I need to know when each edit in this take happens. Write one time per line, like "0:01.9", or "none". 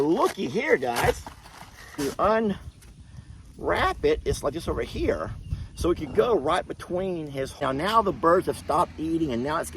0:02.0
0:07.6